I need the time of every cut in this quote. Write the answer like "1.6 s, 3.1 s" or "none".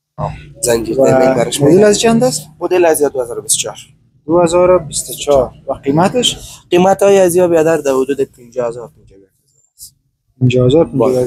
none